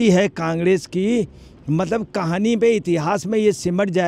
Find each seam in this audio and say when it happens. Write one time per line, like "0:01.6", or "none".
none